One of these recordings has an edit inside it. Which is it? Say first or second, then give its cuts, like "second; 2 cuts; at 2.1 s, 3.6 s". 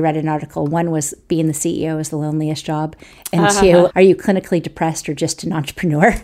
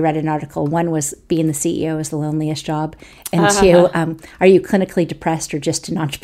first; 1 cut; at 3.9 s